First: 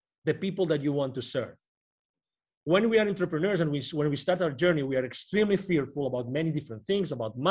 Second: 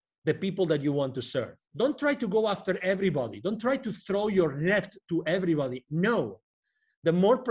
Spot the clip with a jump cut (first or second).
second